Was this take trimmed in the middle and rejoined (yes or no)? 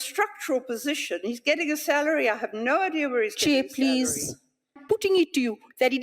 yes